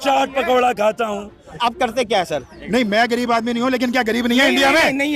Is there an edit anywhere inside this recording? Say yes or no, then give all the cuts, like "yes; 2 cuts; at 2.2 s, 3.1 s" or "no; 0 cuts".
yes; 1 cut; at 1.5 s